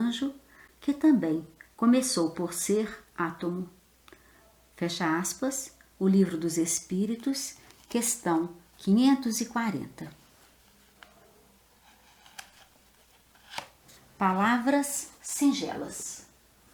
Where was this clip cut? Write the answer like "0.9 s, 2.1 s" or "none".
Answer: none